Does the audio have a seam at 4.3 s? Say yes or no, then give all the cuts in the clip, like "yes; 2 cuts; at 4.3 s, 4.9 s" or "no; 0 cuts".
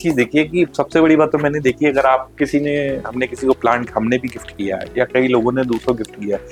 no; 0 cuts